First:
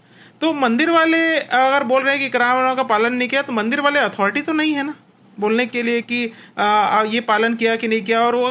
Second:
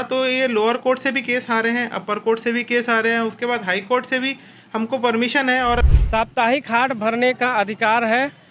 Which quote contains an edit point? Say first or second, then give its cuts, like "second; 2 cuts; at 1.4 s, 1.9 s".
second; 1 cut; at 5.9 s